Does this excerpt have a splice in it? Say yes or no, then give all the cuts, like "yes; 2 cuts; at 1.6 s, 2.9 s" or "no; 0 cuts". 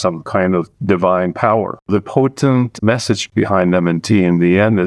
yes; 2 cuts; at 1.8 s, 3.2 s